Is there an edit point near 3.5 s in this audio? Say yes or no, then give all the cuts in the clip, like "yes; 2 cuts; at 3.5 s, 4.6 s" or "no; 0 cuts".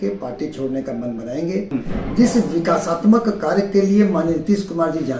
no; 1 cut; at 1.7 s